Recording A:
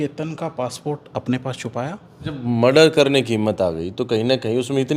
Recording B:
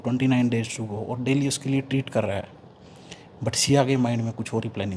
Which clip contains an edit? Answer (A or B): A